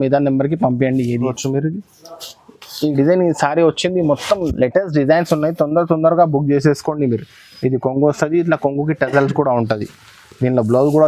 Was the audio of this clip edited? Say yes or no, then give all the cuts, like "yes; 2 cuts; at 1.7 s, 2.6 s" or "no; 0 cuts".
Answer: yes; 1 cut; at 1.1 s